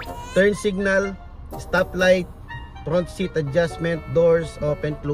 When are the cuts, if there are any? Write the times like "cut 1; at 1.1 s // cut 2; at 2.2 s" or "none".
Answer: none